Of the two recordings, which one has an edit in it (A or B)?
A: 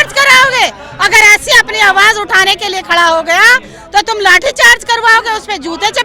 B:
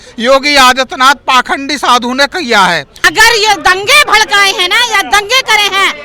B